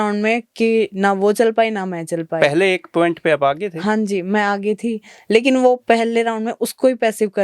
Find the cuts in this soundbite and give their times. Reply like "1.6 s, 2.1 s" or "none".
none